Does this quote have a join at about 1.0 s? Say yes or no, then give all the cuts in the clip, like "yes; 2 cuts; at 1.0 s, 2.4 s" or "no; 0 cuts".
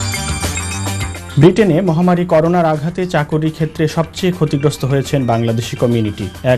yes; 1 cut; at 1.0 s